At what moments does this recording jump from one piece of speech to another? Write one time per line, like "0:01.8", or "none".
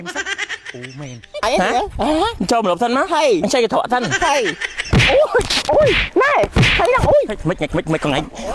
0:01.4